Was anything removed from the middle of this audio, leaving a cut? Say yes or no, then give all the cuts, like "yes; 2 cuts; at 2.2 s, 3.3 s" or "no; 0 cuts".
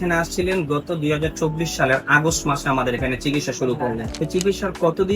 yes; 1 cut; at 4.1 s